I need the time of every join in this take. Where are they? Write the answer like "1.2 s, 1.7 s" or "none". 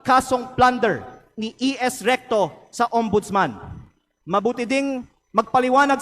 none